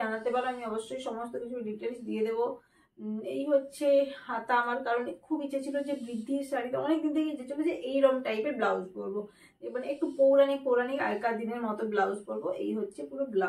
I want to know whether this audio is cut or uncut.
uncut